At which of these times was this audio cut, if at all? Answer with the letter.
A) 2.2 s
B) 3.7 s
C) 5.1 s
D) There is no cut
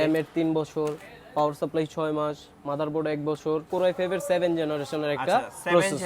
B